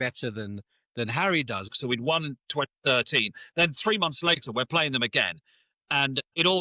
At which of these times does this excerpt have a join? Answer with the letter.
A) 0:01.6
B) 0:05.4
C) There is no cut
A